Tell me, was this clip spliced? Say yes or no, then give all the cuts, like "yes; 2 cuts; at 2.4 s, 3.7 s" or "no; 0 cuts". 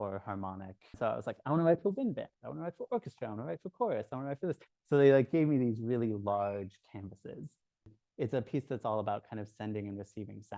yes; 2 cuts; at 1.0 s, 8.0 s